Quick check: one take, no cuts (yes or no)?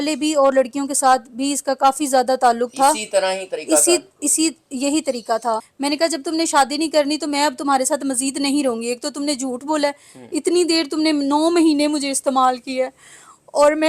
no